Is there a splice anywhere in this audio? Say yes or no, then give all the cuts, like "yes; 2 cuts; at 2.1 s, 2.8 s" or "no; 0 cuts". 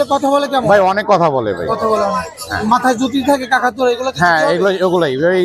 no; 0 cuts